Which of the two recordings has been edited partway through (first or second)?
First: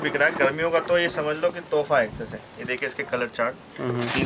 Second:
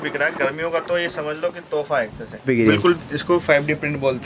second